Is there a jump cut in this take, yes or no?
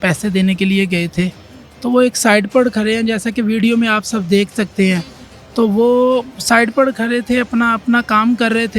no